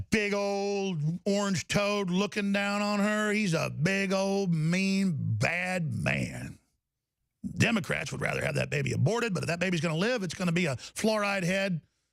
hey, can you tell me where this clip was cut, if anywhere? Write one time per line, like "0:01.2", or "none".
none